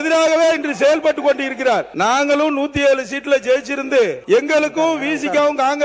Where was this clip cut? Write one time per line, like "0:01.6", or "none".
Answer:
0:01.9
0:04.2